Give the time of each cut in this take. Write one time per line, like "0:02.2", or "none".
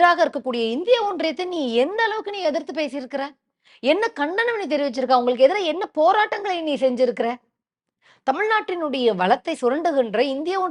none